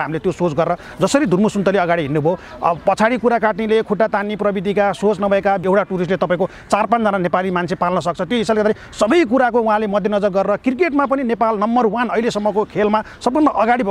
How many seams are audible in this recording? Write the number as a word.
one